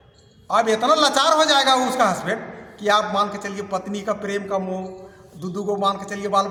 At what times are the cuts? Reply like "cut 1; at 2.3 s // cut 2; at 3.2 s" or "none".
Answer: none